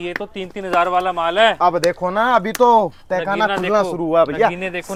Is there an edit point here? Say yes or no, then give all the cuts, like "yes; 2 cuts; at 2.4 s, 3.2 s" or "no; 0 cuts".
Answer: no; 0 cuts